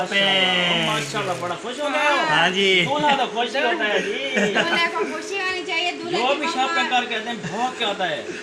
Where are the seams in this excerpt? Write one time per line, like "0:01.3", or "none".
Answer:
none

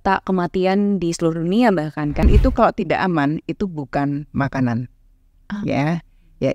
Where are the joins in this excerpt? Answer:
0:02.2

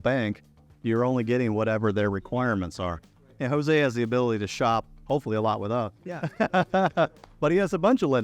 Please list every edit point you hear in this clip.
none

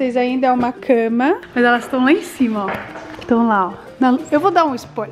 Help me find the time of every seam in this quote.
0:01.4

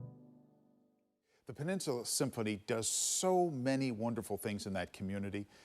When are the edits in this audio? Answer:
0:01.3

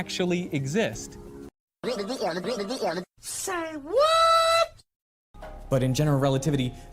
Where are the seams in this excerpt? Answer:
0:01.0

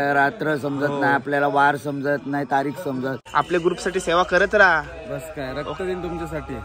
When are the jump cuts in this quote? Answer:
0:03.2

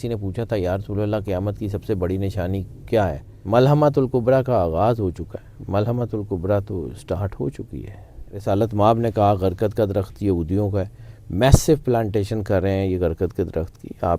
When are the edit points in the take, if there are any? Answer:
0:03.3
0:08.3

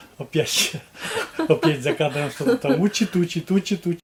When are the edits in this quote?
none

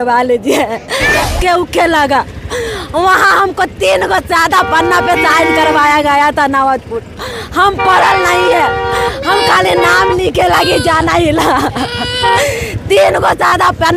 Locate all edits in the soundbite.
0:01.3

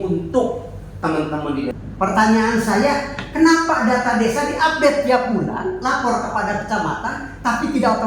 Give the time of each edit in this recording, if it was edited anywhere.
0:01.7

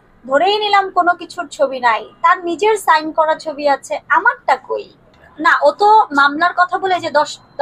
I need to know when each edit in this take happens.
0:05.3

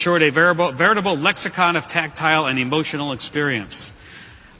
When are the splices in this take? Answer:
0:01.4

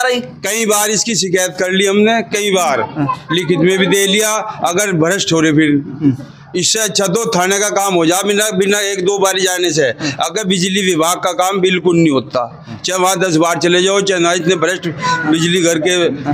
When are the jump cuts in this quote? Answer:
none

